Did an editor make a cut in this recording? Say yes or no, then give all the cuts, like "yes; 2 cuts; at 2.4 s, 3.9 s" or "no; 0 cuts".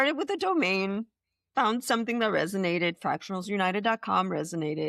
no; 0 cuts